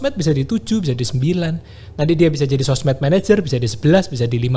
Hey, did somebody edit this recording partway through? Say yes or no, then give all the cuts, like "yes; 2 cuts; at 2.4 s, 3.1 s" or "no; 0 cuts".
no; 0 cuts